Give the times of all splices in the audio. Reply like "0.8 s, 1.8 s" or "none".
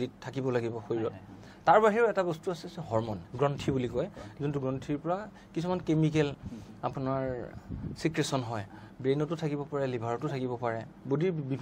none